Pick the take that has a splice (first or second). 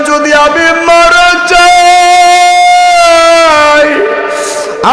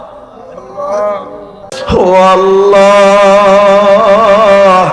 second